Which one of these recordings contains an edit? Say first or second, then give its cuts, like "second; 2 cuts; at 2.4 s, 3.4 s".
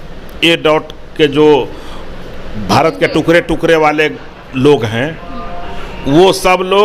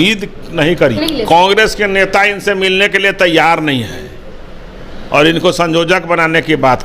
second; 1 cut; at 1.0 s